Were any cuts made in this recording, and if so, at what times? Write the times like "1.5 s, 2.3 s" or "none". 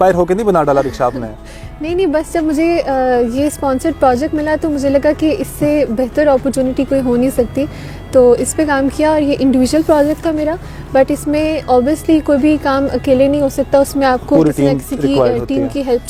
none